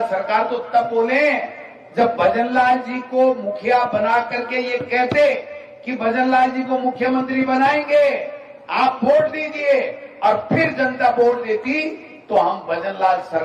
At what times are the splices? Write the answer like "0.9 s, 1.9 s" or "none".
none